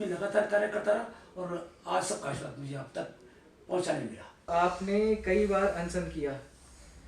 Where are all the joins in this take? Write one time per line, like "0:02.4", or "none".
0:04.5